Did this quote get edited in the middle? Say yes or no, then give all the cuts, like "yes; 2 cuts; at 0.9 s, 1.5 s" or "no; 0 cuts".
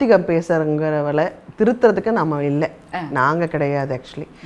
no; 0 cuts